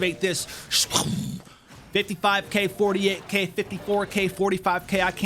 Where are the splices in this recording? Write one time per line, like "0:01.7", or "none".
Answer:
none